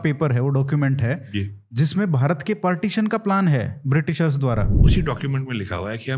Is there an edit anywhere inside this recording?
yes; 1 cut; at 4.8 s

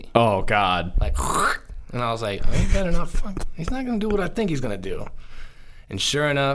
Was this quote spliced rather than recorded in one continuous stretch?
no; 0 cuts

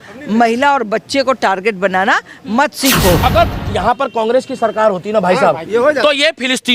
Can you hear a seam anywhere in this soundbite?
yes; 1 cut; at 3.2 s

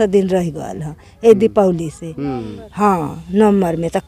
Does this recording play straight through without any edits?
yes; 0 cuts

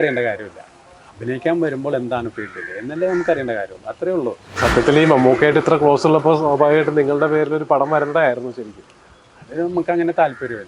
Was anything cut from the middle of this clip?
yes; 1 cut; at 4.5 s

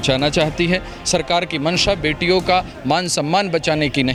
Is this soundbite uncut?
yes; 0 cuts

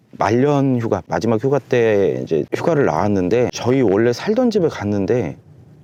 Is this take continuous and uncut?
yes; 0 cuts

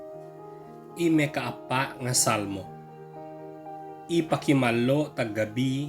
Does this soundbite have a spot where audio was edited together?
yes; 3 cuts; at 0.9 s, 2.6 s, 4.1 s

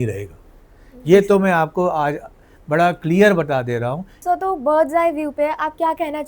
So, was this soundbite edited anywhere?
yes; 1 cut; at 4.1 s

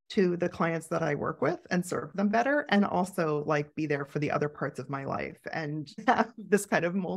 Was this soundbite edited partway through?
yes; 1 cut; at 6.0 s

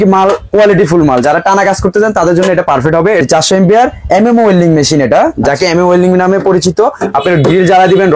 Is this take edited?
yes; 1 cut; at 3.2 s

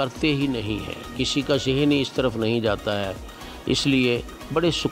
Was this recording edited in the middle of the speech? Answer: no; 0 cuts

